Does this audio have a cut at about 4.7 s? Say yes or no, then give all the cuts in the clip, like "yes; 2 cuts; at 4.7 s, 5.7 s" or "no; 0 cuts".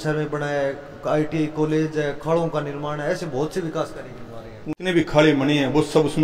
yes; 1 cut; at 4.7 s